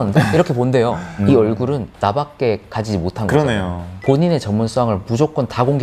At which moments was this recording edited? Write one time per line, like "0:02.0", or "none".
0:01.2
0:04.0